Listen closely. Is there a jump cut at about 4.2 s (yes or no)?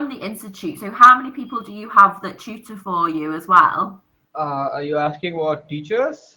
no